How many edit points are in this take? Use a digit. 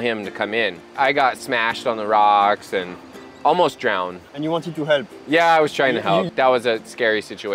3